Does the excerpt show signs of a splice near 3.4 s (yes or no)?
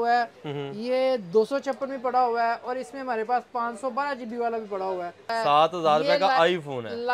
no